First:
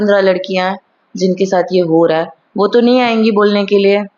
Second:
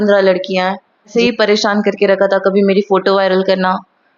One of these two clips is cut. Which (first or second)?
second